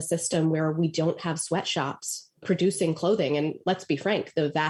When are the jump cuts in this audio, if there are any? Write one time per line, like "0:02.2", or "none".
none